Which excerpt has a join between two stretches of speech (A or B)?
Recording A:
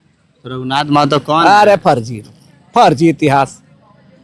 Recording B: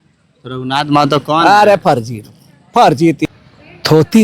B